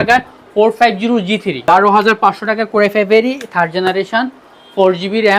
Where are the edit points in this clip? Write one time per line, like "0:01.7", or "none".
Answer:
0:01.6